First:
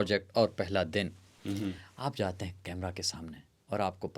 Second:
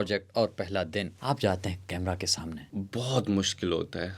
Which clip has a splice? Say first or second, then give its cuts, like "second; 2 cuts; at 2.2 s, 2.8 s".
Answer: second; 2 cuts; at 1.1 s, 2.7 s